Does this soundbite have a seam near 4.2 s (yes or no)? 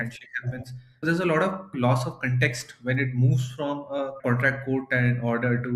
no